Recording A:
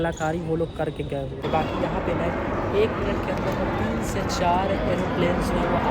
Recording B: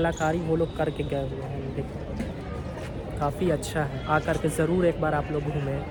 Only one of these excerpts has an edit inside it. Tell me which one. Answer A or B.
A